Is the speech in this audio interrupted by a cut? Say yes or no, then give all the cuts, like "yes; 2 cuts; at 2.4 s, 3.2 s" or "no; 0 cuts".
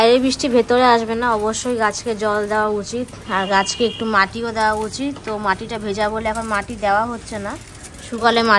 no; 0 cuts